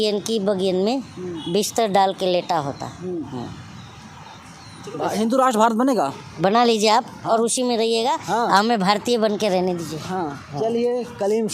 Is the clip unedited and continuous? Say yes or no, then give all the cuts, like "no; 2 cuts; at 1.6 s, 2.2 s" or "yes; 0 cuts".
yes; 0 cuts